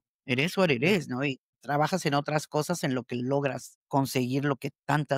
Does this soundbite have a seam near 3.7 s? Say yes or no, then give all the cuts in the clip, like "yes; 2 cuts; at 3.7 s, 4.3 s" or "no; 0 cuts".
yes; 2 cuts; at 1.5 s, 3.7 s